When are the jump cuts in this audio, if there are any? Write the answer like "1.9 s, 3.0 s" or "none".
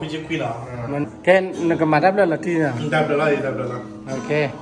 1.1 s